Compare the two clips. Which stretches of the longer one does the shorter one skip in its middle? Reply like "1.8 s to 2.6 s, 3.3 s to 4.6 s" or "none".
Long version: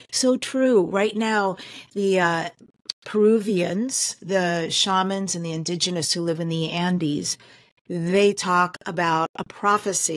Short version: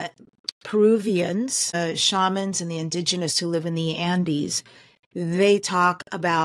4.2 s to 4.5 s